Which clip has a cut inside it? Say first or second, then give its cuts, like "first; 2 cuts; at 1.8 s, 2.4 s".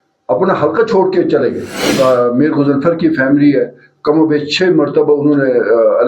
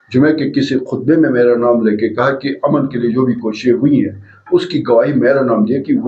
first; 1 cut; at 1.9 s